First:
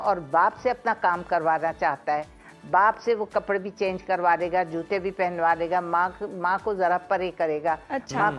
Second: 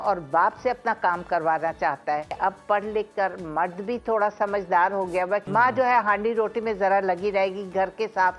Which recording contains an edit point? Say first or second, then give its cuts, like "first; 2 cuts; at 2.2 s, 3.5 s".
second; 2 cuts; at 2.4 s, 5.4 s